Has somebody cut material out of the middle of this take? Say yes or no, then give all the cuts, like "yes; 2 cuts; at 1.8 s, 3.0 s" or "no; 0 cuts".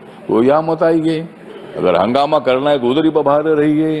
no; 0 cuts